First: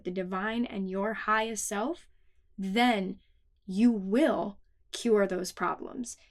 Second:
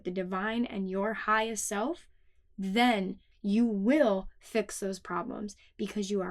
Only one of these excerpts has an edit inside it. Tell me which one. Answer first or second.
second